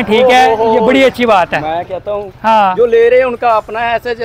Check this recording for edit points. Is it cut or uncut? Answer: uncut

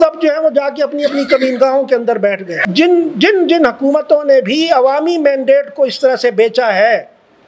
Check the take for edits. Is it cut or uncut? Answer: cut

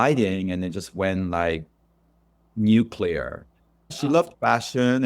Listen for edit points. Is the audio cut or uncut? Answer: cut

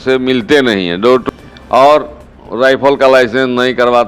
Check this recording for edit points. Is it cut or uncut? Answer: cut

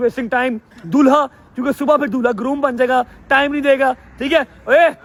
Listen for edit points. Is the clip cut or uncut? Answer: uncut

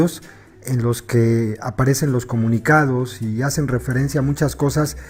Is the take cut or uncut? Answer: uncut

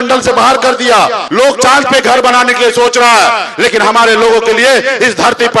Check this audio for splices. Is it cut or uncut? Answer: cut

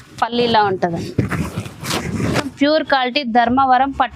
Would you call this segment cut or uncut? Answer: cut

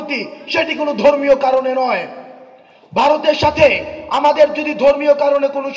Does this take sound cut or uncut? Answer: uncut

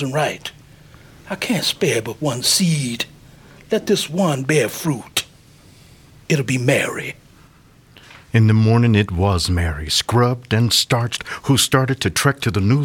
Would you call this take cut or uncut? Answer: uncut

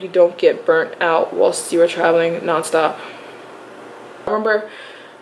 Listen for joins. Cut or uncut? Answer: cut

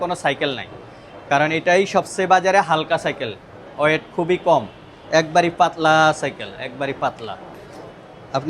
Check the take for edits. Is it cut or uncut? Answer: uncut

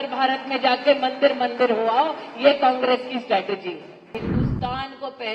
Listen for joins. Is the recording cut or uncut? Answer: cut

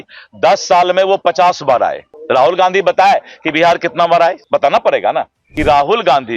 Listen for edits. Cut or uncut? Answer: cut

